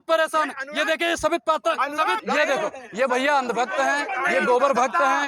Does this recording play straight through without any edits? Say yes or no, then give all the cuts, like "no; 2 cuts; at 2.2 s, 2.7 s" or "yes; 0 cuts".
no; 1 cut; at 2.2 s